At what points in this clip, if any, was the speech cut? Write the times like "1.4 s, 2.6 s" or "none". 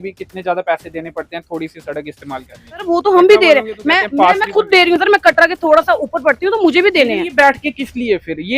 2.8 s

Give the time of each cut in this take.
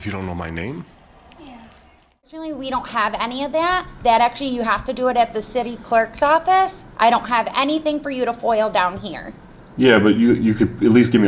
2.3 s

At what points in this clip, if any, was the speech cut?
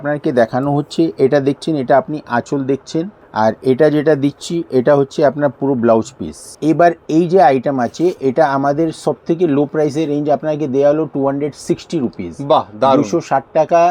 3.2 s, 6.5 s

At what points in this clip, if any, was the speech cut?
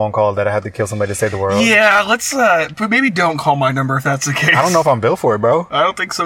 none

